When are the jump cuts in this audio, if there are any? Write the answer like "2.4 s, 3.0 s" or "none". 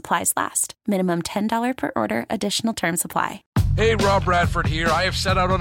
3.4 s